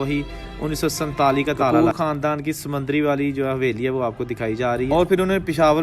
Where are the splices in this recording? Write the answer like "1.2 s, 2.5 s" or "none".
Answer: 1.7 s, 4.9 s